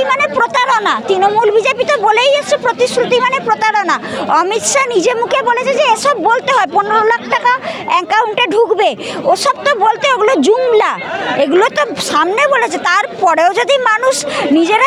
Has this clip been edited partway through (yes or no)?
no